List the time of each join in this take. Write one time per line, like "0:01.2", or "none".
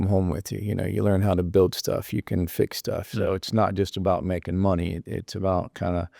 0:03.1